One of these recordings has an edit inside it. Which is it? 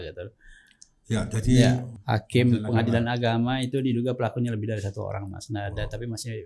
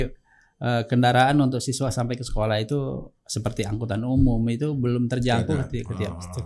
first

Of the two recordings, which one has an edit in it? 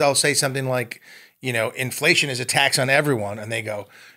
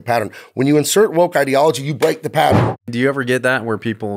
second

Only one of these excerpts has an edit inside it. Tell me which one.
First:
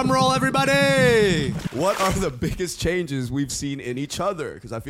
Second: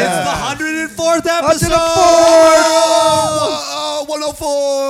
first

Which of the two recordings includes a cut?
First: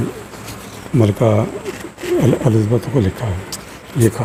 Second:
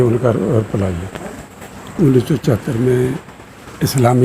second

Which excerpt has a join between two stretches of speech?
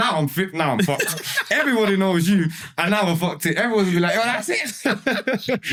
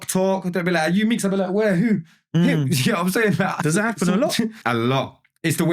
second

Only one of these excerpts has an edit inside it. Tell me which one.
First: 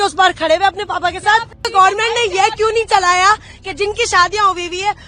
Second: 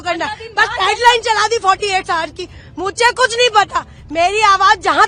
first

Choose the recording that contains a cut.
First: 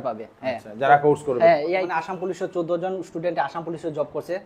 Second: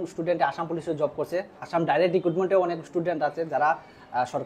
first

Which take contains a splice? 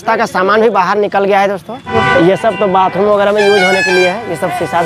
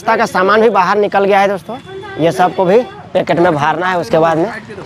first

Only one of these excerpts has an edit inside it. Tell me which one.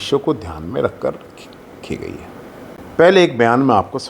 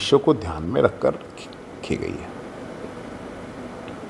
first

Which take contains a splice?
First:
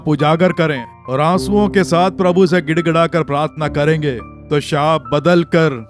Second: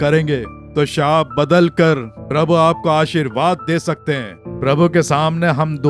second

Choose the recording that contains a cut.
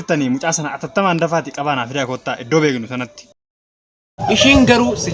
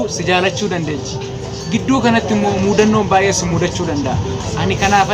first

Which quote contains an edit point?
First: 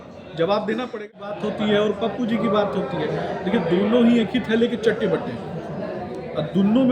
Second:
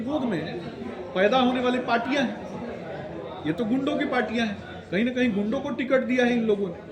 first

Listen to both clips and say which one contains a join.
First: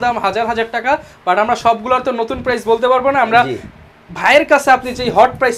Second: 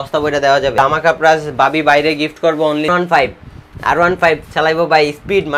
second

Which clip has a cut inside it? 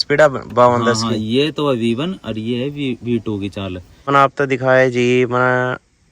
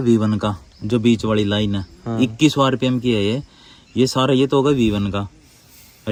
first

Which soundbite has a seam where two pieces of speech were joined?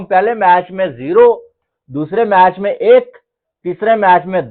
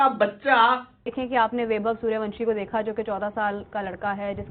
second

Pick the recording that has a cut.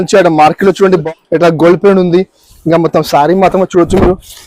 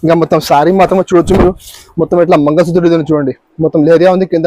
first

